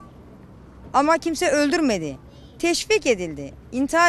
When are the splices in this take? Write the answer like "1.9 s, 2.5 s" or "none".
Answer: none